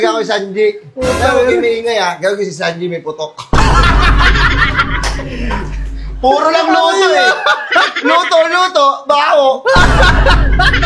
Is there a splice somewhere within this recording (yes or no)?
no